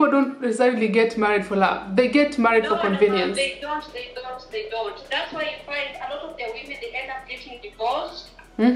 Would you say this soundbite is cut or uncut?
uncut